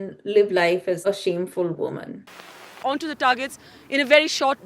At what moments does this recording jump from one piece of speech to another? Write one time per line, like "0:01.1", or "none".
0:01.0
0:02.6